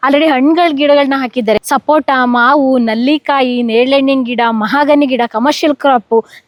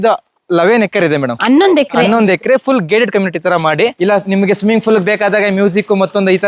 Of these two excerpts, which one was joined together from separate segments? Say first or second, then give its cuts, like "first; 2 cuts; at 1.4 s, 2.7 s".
second; 1 cut; at 3.9 s